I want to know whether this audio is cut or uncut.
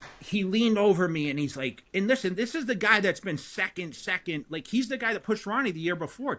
uncut